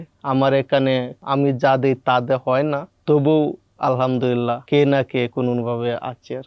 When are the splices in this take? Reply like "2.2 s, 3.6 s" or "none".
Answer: 1.2 s, 2.9 s, 4.6 s